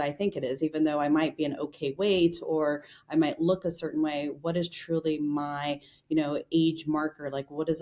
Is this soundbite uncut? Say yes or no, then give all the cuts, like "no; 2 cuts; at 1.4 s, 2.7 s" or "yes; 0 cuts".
yes; 0 cuts